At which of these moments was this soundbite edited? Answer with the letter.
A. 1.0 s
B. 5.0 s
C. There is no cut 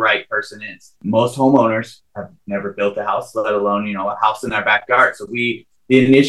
A